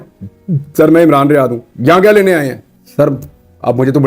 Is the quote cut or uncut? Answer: uncut